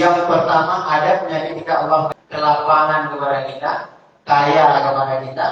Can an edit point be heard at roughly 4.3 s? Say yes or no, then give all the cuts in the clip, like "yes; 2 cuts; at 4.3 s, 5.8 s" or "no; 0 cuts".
no; 1 cut; at 2.1 s